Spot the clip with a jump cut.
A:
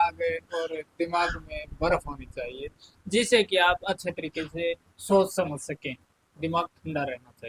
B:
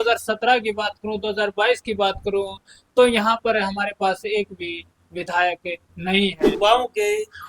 B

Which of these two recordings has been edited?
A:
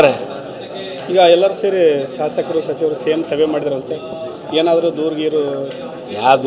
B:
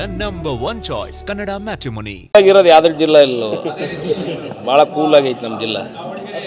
B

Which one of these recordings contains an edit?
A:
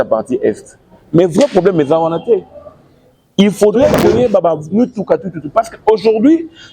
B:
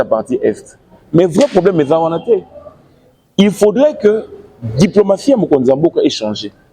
A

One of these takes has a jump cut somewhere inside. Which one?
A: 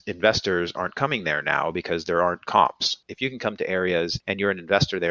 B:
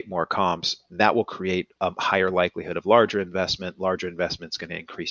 A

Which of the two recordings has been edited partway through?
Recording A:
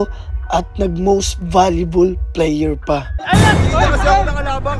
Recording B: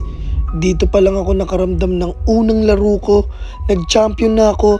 A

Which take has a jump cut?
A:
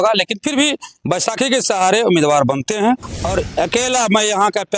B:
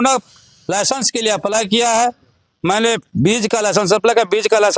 A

